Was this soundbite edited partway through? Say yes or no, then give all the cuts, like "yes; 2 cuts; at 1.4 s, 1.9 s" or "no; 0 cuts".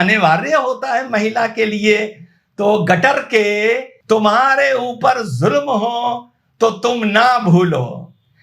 yes; 1 cut; at 3.9 s